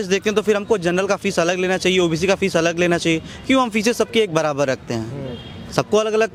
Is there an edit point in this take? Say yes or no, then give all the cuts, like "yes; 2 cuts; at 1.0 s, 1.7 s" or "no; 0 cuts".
no; 0 cuts